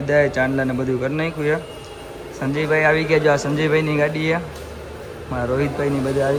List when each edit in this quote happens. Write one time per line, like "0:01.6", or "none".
none